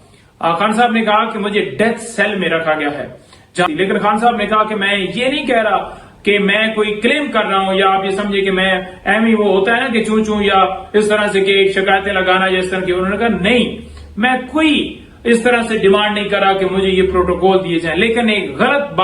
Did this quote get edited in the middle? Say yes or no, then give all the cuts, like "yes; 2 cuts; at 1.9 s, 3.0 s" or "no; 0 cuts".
yes; 1 cut; at 3.7 s